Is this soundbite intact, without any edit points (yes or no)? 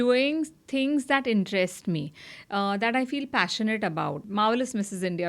no